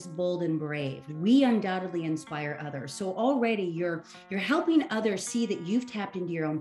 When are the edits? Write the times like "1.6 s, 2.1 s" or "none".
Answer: none